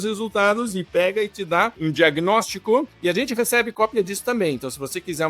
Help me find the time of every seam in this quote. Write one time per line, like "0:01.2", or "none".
0:01.8
0:02.9